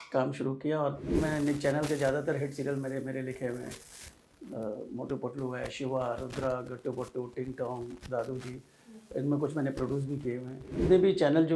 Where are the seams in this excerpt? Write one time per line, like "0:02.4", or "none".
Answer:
0:01.2
0:10.8